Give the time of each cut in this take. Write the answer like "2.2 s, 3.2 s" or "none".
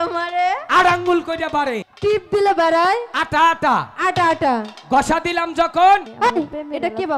1.8 s, 6.1 s